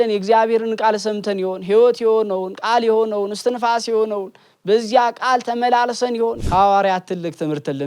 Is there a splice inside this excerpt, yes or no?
yes